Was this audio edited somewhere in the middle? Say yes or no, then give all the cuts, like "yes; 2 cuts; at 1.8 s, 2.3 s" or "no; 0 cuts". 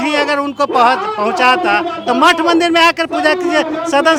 no; 0 cuts